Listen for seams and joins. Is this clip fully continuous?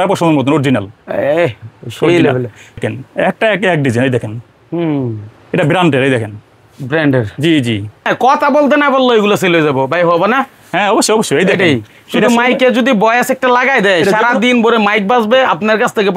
no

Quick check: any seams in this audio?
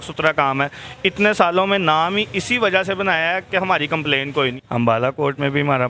yes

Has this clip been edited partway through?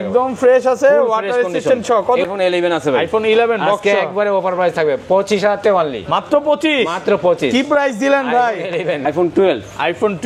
yes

